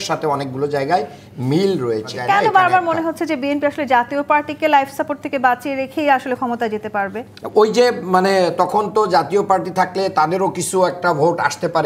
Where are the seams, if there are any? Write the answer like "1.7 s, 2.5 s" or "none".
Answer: 2.2 s

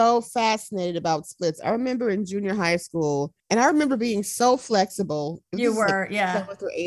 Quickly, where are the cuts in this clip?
3.4 s

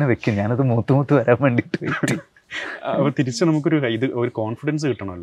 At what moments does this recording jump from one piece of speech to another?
none

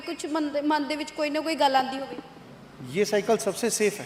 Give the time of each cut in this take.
none

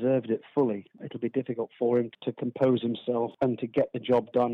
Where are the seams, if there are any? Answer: 1.0 s, 2.1 s, 3.3 s

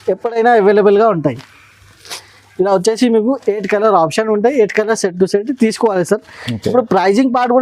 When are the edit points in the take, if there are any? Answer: none

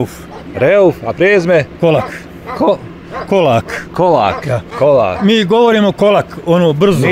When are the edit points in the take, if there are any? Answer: none

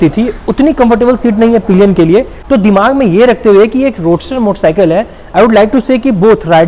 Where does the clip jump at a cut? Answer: none

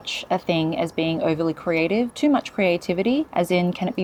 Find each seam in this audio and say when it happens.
none

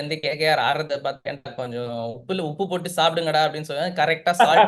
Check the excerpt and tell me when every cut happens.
none

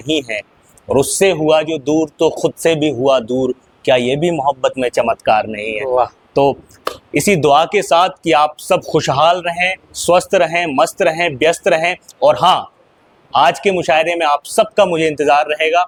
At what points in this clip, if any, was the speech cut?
none

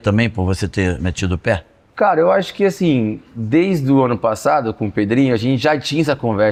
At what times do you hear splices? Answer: none

